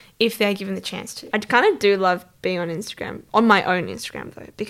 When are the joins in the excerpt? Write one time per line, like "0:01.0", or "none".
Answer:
0:01.2